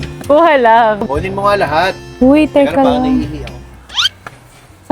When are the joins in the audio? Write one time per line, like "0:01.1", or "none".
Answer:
0:01.1